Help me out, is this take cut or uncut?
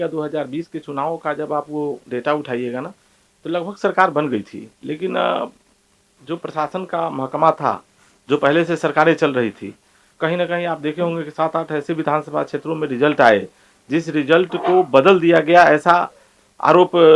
uncut